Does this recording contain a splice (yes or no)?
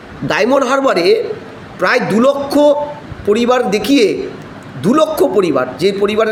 no